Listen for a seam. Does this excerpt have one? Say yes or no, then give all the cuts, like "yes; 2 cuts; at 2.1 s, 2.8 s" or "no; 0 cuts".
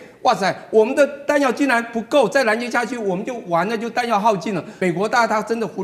yes; 1 cut; at 4.7 s